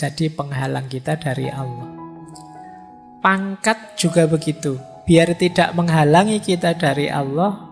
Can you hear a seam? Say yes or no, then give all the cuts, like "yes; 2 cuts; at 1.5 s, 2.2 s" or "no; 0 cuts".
yes; 2 cuts; at 1.7 s, 3.1 s